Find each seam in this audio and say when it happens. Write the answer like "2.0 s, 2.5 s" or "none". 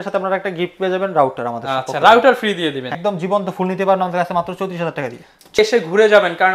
3.0 s, 5.6 s